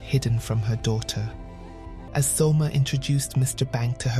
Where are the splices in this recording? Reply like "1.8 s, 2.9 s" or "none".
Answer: 1.9 s